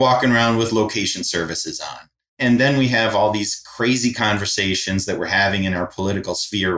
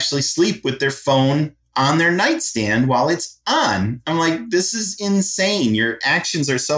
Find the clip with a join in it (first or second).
first